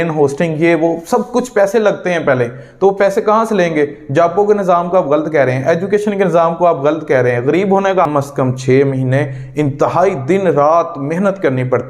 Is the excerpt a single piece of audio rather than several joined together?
no; 1 cut; at 8.1 s

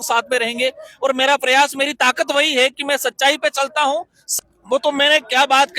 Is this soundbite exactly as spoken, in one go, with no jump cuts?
no; 1 cut; at 4.2 s

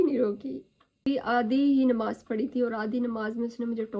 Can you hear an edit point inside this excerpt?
yes; 1 cut; at 1.0 s

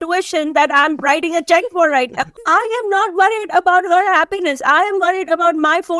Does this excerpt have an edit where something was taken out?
yes; 1 cut; at 2.3 s

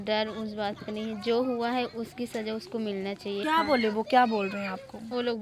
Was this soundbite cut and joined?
no; 0 cuts

